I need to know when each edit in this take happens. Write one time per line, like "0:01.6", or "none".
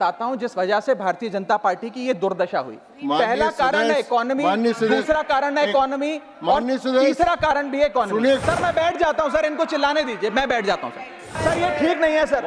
0:08.4
0:11.4